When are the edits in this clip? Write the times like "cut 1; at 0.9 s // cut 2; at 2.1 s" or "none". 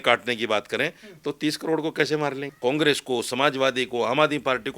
cut 1; at 2.5 s